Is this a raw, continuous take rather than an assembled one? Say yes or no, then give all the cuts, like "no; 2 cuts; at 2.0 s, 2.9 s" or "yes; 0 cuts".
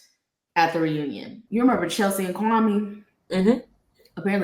no; 1 cut; at 1.4 s